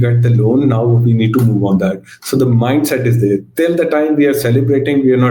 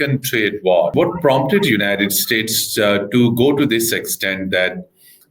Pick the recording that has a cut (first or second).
second